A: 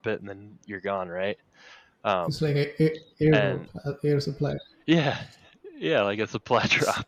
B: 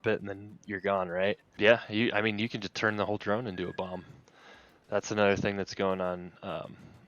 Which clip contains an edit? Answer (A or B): B